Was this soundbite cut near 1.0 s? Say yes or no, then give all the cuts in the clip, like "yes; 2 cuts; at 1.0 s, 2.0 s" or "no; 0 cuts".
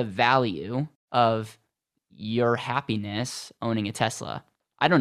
yes; 1 cut; at 1.0 s